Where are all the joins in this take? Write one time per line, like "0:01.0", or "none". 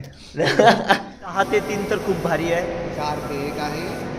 0:01.3